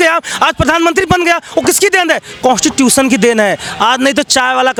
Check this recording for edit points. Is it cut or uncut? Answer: uncut